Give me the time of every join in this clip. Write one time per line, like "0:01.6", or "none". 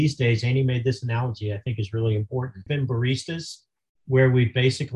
none